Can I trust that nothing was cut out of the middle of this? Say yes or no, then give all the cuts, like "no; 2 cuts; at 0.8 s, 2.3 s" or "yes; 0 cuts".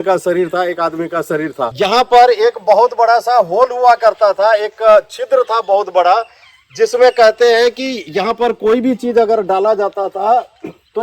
no; 1 cut; at 1.6 s